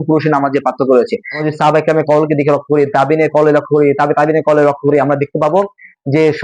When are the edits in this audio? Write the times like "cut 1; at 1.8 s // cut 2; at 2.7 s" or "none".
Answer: cut 1; at 1.4 s

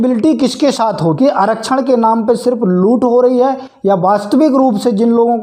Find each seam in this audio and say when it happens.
cut 1; at 1.1 s

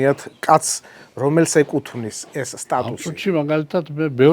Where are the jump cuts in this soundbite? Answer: cut 1; at 2.9 s

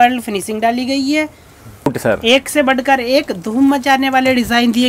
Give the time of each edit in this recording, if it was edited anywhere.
cut 1; at 1.9 s

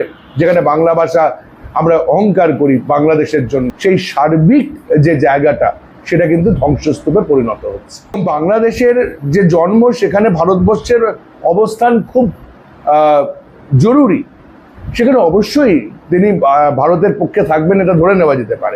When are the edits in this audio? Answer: cut 1; at 3.7 s // cut 2; at 8.2 s

